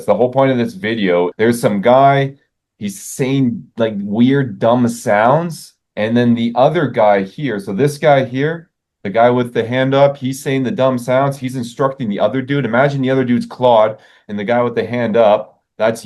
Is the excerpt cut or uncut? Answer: cut